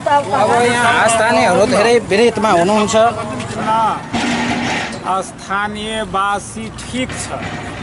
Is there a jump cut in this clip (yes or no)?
yes